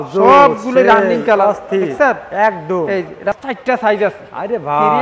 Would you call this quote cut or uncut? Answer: cut